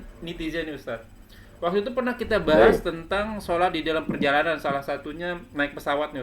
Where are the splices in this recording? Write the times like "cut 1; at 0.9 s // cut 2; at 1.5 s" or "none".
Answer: none